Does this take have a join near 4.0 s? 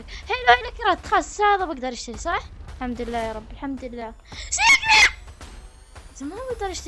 no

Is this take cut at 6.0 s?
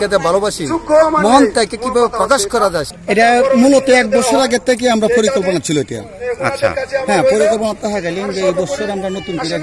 no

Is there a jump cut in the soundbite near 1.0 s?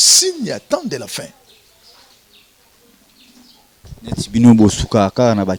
no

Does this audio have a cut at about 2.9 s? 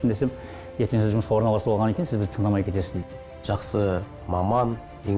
yes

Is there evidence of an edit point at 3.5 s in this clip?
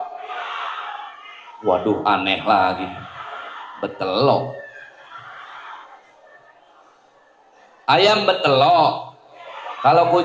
no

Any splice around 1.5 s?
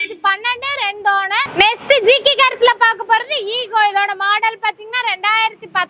yes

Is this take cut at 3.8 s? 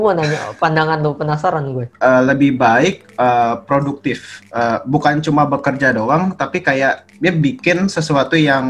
no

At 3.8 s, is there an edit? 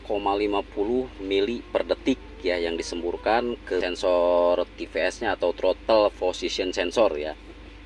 yes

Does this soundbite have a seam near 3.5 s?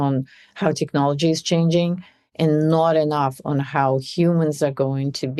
no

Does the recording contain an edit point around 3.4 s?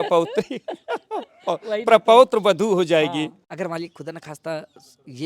yes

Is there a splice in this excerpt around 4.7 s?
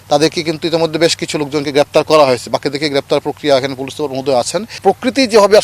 yes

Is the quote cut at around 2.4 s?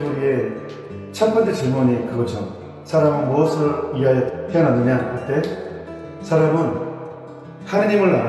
no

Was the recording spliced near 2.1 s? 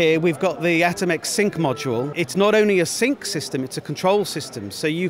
yes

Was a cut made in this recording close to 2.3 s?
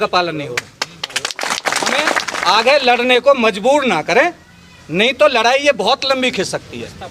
yes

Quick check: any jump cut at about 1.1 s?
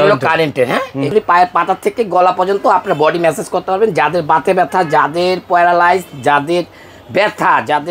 yes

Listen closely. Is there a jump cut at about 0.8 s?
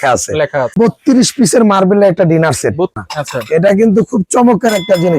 yes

